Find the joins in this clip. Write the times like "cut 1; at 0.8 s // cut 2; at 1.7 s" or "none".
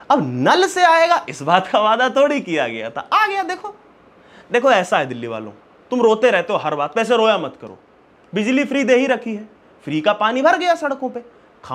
none

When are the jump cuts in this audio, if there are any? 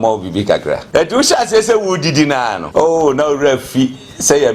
cut 1; at 0.8 s // cut 2; at 2.6 s

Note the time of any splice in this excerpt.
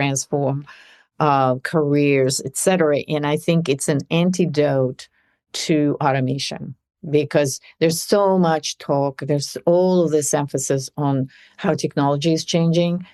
none

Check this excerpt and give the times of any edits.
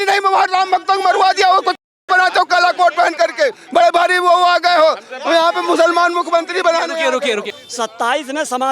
cut 1; at 7.5 s

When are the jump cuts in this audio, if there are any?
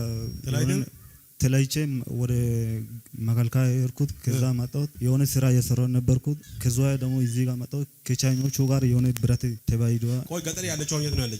cut 1; at 4.9 s // cut 2; at 6.5 s // cut 3; at 9.6 s

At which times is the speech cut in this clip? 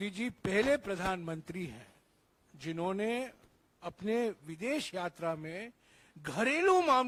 none

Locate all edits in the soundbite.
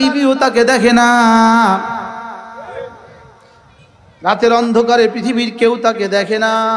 none

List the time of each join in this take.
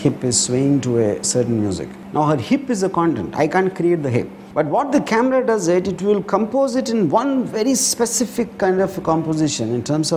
cut 1; at 1.9 s // cut 2; at 4.4 s

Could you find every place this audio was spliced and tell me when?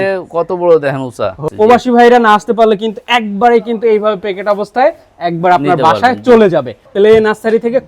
cut 1; at 1.4 s // cut 2; at 6.8 s

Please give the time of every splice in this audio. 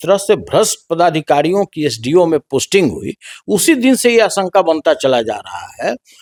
none

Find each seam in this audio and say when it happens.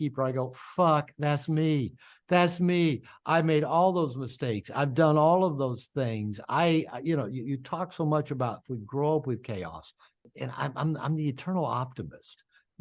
cut 1; at 10.2 s

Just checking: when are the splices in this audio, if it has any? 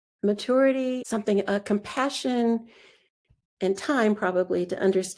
cut 1; at 1.0 s

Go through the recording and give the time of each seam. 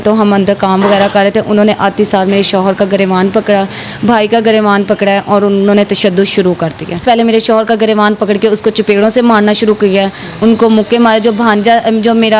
cut 1; at 7.0 s

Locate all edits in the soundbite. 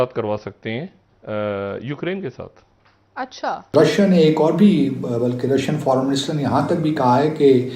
cut 1; at 3.7 s

